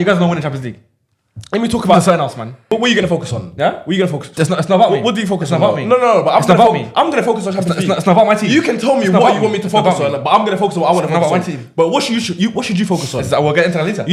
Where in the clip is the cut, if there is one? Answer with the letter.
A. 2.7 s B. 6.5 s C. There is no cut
A